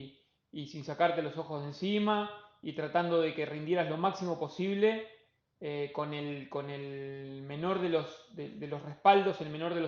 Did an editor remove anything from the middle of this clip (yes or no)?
no